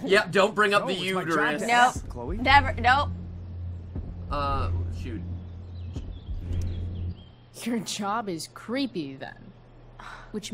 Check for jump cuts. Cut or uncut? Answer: uncut